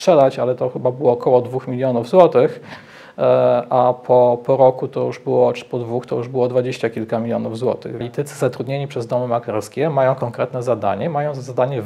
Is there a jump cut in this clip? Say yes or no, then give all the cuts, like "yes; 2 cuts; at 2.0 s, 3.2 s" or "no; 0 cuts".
yes; 1 cut; at 8.0 s